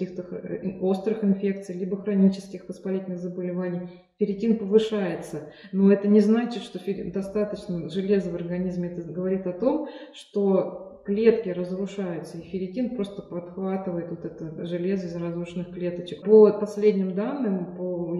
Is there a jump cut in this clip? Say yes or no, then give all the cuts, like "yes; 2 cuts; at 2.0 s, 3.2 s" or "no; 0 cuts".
yes; 1 cut; at 16.2 s